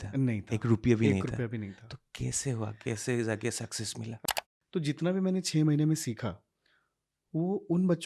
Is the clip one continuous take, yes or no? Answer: no